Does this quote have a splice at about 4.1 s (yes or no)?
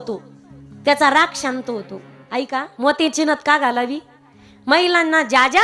no